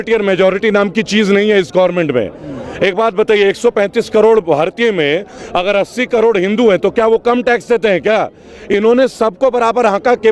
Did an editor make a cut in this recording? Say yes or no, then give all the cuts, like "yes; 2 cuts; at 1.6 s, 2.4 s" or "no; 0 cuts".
no; 0 cuts